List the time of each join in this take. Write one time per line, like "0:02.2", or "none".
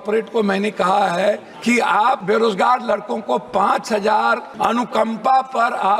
0:01.9
0:04.5

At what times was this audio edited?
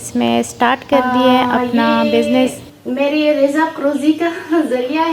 0:02.7

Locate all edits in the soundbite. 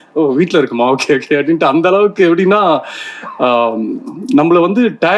none

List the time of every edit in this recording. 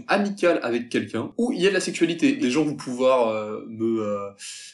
0:01.3
0:02.4

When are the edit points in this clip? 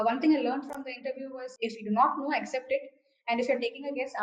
0:01.4

